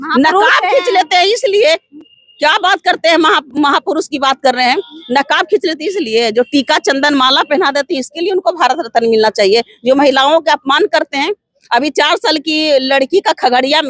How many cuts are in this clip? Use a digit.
0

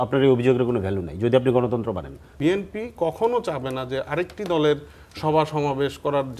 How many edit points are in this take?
1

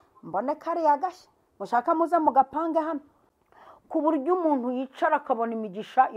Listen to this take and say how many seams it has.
1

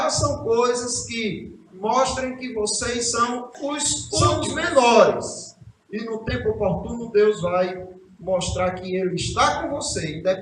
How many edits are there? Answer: 1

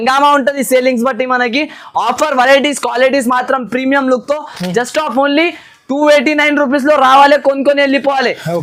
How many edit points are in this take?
0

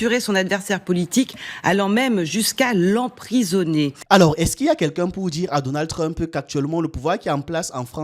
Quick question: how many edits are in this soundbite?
1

